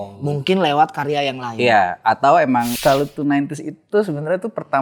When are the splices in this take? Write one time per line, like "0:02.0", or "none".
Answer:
0:02.7